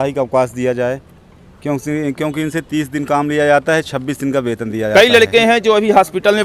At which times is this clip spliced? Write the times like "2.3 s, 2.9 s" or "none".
4.9 s